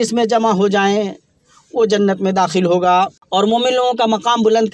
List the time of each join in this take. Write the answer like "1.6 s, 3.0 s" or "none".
3.2 s